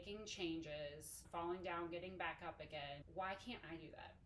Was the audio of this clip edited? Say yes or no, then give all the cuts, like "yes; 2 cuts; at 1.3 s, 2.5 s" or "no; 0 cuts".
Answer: yes; 1 cut; at 1.2 s